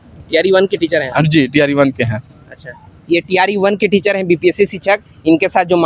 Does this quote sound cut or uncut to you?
uncut